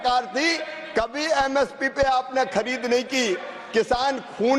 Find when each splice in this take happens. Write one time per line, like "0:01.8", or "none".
none